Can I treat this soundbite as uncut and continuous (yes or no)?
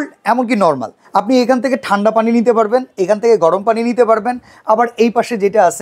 yes